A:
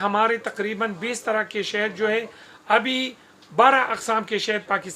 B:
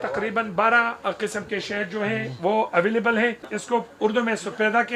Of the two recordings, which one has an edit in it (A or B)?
B